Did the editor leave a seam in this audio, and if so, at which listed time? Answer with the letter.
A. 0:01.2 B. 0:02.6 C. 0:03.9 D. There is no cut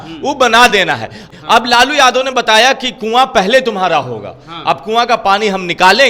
A